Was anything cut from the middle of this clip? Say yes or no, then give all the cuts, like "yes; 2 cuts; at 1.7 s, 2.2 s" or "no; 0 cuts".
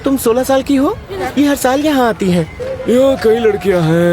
yes; 2 cuts; at 1.1 s, 2.6 s